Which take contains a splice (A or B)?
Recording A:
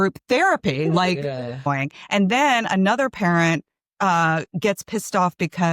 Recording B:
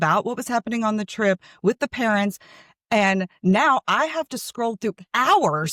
A